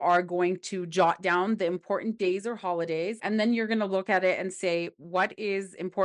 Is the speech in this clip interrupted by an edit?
yes; 1 cut; at 3.2 s

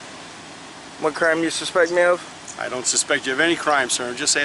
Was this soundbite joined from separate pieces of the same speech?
no; 0 cuts

